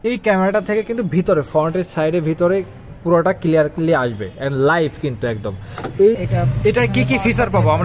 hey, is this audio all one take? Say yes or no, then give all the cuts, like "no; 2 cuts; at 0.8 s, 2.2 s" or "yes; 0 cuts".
no; 1 cut; at 6.2 s